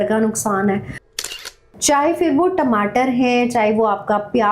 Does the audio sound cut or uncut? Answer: cut